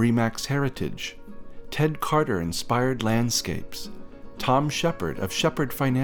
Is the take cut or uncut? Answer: uncut